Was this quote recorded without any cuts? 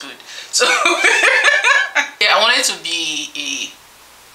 no; 1 cut; at 2.1 s

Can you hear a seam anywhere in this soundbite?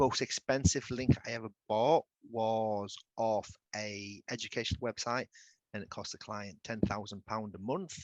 no; 0 cuts

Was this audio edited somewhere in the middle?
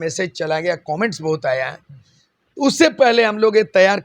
no; 0 cuts

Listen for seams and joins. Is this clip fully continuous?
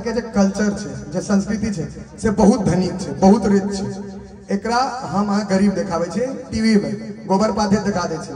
yes; 0 cuts

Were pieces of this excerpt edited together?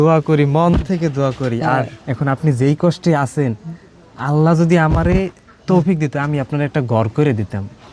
yes; 1 cut; at 2.0 s

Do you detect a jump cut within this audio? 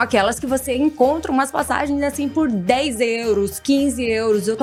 no; 0 cuts

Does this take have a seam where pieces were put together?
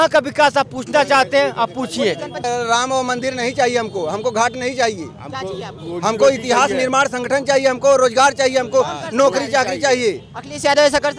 yes; 1 cut; at 2.4 s

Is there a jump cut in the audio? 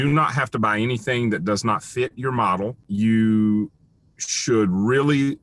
yes; 1 cut; at 2.9 s

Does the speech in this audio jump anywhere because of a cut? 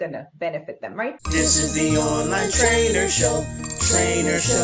yes; 1 cut; at 1.2 s

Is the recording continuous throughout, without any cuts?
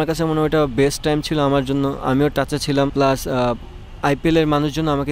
no; 1 cut; at 2.9 s

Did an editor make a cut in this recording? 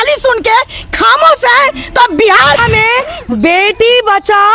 yes; 1 cut; at 2.6 s

